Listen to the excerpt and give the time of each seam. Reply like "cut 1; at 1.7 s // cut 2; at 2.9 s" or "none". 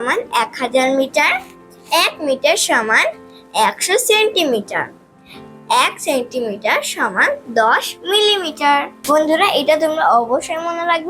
cut 1; at 8.9 s

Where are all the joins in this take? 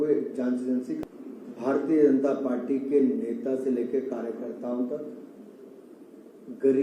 cut 1; at 1.0 s

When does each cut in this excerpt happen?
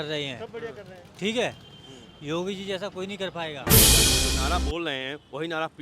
cut 1; at 3.6 s // cut 2; at 4.3 s

